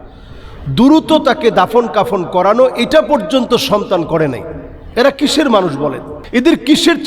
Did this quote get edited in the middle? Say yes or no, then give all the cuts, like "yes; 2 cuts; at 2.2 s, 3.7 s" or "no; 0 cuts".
yes; 1 cut; at 6.1 s